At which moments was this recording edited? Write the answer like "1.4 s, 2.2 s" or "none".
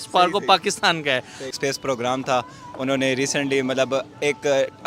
1.5 s